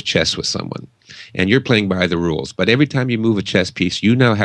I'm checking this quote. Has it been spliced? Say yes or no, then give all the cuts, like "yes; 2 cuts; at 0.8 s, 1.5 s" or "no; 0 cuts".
yes; 1 cut; at 3.1 s